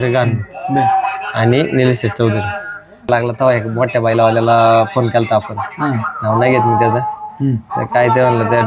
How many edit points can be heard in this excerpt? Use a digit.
1